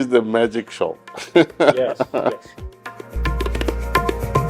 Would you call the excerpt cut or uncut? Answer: cut